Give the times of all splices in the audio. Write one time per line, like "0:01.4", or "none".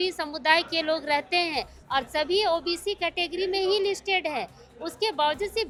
none